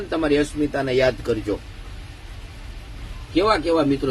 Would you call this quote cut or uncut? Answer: uncut